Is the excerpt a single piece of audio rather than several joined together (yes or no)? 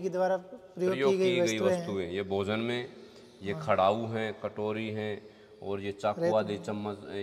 yes